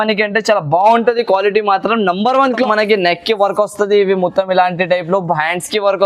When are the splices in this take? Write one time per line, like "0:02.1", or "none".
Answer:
0:02.6